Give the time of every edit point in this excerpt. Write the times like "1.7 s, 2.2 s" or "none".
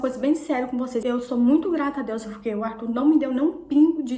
none